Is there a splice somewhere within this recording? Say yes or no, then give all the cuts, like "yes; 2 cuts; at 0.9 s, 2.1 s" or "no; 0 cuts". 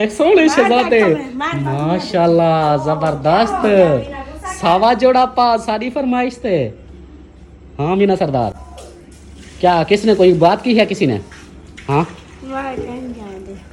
no; 0 cuts